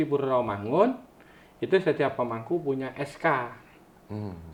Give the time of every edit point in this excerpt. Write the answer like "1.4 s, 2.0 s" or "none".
none